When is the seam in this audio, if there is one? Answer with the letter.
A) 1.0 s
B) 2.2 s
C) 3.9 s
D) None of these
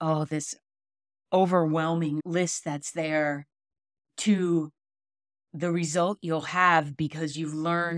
B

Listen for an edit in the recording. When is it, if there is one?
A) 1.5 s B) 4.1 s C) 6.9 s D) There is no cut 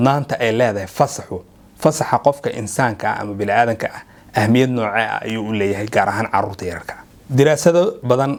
D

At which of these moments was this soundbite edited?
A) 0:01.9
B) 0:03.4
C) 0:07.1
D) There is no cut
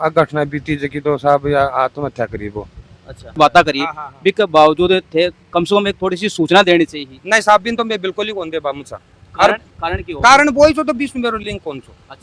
B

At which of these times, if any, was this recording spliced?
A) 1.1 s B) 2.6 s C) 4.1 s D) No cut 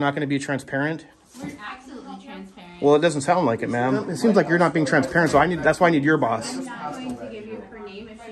C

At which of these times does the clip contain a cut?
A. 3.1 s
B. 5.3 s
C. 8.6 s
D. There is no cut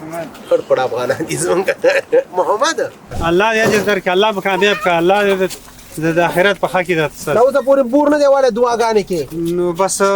A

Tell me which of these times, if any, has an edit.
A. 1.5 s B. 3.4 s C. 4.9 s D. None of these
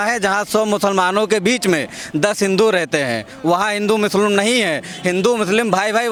D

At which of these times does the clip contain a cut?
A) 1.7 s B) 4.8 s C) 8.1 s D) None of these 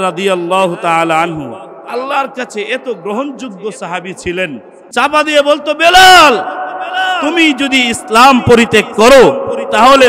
B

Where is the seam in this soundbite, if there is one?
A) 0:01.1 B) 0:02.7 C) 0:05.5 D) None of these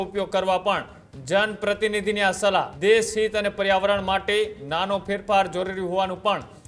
B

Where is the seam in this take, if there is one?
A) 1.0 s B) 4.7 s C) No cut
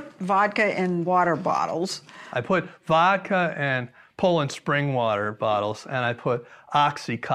A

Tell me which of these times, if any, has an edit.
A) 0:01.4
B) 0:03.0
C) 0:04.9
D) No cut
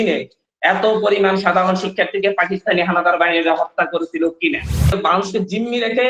C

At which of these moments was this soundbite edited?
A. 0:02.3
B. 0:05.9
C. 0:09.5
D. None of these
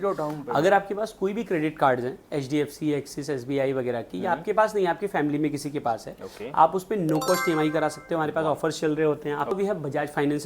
C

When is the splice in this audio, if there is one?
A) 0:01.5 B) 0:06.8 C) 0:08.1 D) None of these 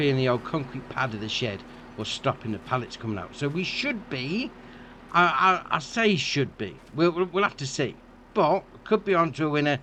D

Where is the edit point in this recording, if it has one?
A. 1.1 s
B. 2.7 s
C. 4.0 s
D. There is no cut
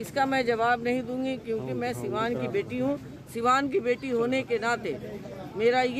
D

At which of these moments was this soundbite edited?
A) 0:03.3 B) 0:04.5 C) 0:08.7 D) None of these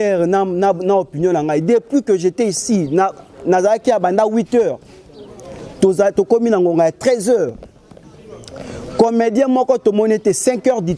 D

